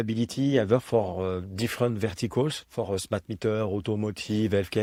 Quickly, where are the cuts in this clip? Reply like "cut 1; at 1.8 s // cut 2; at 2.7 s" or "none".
none